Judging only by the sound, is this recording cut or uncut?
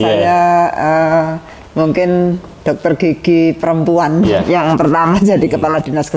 uncut